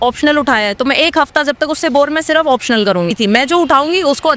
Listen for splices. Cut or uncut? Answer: cut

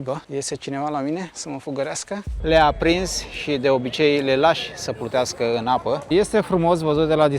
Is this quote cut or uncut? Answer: cut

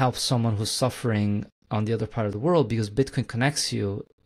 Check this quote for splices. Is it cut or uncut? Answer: uncut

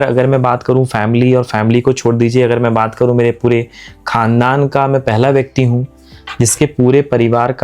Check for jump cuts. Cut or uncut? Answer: uncut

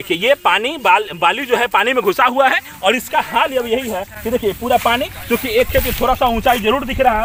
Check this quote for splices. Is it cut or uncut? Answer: uncut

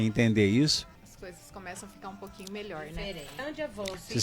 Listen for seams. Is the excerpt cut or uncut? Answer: cut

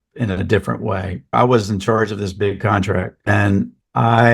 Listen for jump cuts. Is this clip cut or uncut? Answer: cut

